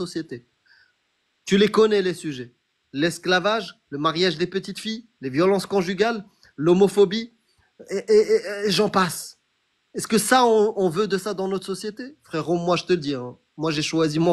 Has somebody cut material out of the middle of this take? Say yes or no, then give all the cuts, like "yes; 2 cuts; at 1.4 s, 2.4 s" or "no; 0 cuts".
no; 0 cuts